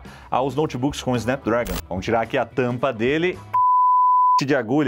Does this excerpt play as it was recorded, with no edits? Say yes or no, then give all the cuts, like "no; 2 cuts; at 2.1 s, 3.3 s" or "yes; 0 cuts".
no; 1 cut; at 1.8 s